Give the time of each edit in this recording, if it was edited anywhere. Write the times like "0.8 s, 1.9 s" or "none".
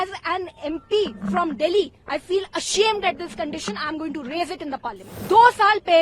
5.1 s